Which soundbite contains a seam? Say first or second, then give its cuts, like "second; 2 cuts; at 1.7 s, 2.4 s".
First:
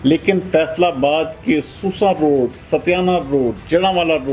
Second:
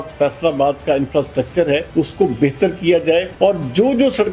second; 2 cuts; at 1.9 s, 3.3 s